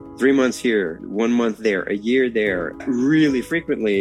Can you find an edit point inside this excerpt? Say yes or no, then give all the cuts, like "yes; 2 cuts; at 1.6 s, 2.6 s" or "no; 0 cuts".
yes; 2 cuts; at 1.0 s, 2.8 s